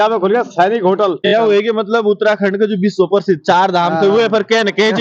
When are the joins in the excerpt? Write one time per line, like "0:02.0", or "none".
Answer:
0:01.2